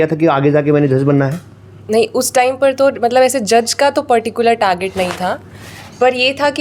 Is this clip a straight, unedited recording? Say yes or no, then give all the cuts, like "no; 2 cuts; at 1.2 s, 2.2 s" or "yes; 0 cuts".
yes; 0 cuts